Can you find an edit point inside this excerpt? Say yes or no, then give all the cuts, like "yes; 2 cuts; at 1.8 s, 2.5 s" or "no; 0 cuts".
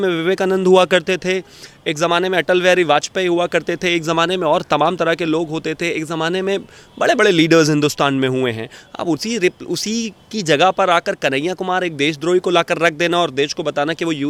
no; 0 cuts